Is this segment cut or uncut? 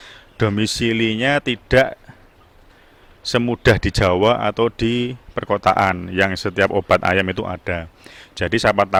uncut